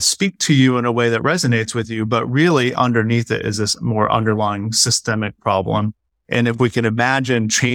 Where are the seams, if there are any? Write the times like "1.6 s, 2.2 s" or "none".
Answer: none